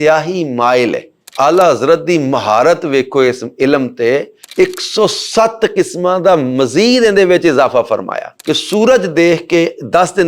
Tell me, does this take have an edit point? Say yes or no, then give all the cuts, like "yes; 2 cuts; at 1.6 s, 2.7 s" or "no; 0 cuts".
yes; 2 cuts; at 1.2 s, 8.4 s